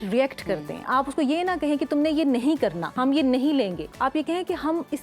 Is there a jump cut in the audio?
yes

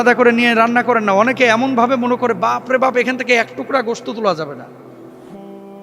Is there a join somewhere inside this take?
no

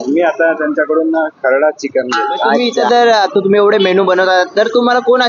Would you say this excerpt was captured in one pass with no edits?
no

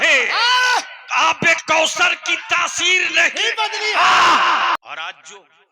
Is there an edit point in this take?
yes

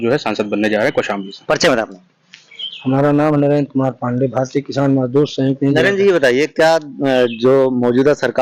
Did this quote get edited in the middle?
no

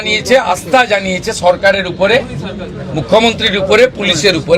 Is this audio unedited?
yes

